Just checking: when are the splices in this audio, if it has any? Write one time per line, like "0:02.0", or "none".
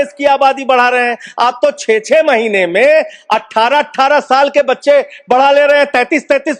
none